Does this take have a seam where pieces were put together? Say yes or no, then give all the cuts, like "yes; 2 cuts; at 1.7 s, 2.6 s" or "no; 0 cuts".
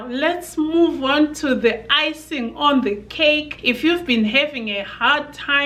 no; 0 cuts